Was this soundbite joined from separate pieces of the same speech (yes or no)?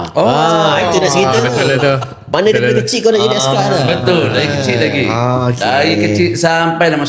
no